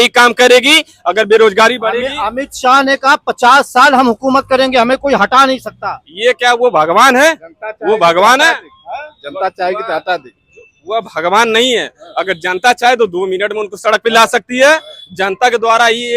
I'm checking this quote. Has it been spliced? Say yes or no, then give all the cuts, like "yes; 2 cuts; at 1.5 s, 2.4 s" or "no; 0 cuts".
no; 0 cuts